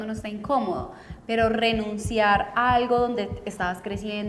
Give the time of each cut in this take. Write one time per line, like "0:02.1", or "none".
none